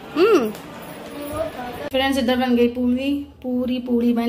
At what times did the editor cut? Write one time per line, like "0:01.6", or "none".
0:01.9